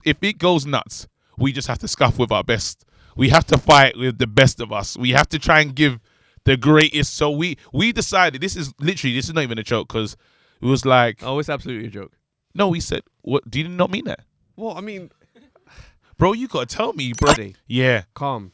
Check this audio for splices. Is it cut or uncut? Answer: cut